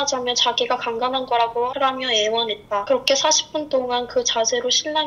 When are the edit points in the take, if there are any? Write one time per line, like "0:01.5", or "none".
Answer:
0:02.9